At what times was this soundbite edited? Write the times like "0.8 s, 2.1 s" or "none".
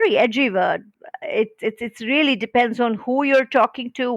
1.0 s